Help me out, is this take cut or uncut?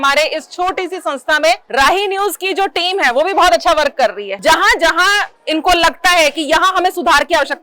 cut